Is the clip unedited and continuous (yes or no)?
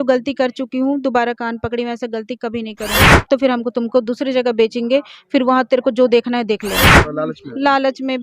no